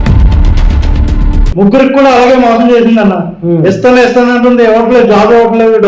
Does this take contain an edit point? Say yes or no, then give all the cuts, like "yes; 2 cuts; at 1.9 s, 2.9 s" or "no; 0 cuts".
yes; 1 cut; at 1.5 s